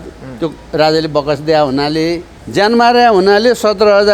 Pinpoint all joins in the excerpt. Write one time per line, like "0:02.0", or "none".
0:02.3